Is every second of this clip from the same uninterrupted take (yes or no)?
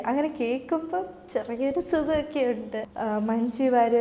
no